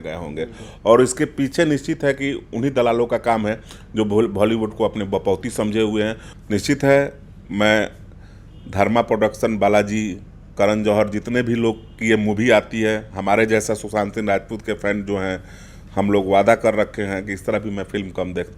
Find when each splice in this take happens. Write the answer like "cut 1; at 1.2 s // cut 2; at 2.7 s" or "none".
cut 1; at 6.3 s